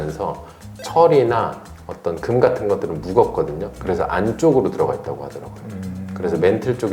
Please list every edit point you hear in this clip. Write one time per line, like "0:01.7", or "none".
none